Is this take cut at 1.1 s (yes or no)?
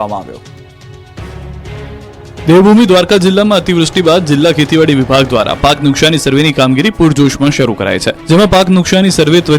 no